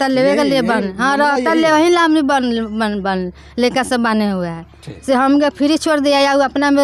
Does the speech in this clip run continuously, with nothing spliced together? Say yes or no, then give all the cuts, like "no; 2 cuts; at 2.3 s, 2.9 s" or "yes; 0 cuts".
yes; 0 cuts